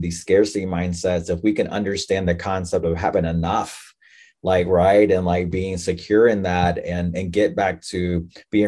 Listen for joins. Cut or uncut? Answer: uncut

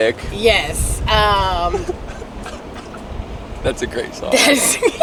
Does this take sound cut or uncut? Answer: uncut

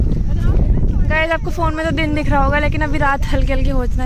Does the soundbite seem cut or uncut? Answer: uncut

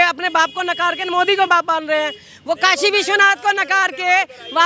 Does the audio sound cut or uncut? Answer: uncut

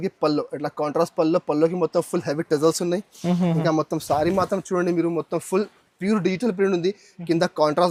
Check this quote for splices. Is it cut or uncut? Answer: uncut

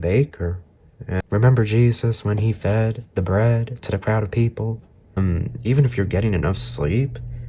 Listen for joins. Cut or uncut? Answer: cut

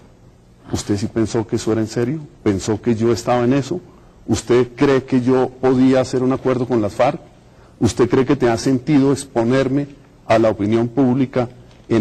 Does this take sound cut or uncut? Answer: cut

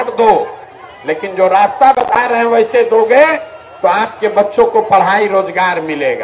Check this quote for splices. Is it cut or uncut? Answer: uncut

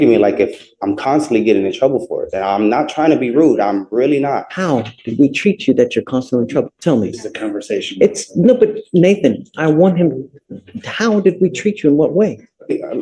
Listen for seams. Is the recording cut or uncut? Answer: uncut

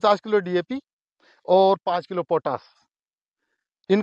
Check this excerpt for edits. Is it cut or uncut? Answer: uncut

